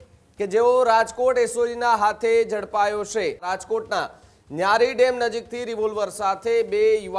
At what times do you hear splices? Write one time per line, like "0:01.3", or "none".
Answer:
0:03.5